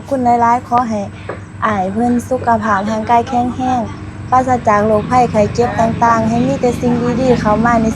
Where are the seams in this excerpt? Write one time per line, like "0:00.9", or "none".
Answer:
none